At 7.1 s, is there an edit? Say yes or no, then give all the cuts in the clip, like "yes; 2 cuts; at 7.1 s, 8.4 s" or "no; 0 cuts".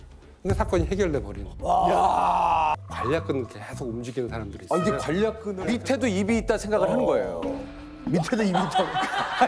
no; 2 cuts; at 2.8 s, 5.5 s